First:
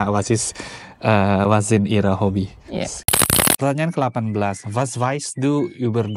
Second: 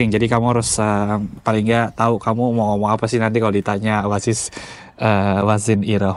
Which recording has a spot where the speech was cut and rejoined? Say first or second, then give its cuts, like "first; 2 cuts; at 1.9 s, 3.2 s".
first; 1 cut; at 3.1 s